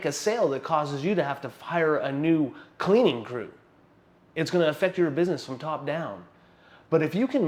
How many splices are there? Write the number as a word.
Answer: zero